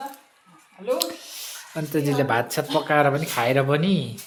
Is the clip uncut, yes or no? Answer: yes